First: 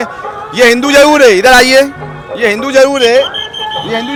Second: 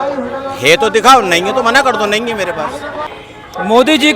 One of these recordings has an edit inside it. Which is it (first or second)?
second